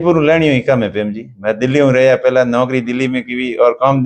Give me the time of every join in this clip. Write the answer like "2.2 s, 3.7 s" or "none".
none